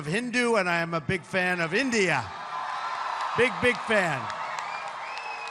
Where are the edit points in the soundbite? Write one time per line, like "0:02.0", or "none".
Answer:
none